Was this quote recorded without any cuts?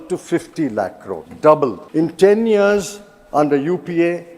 no; 1 cut; at 1.8 s

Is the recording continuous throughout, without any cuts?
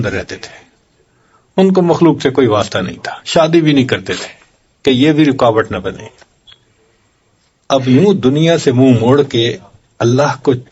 yes; 0 cuts

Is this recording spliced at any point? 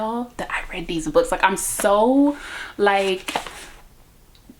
no; 0 cuts

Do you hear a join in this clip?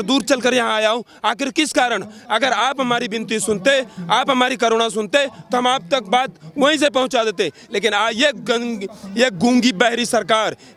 no; 0 cuts

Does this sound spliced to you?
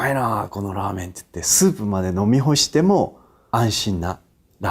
yes; 1 cut; at 3.3 s

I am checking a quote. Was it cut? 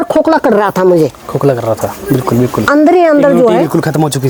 no; 0 cuts

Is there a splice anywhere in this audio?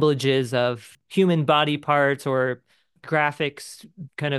yes; 1 cut; at 0.9 s

